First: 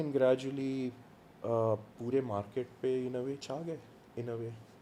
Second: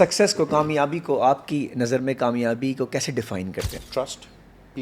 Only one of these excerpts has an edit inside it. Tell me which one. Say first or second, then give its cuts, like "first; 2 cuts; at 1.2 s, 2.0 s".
second; 1 cut; at 3.8 s